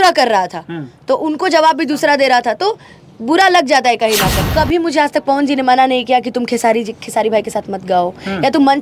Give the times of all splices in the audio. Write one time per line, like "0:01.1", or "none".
0:04.4